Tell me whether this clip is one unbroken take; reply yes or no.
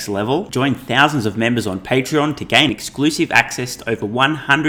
yes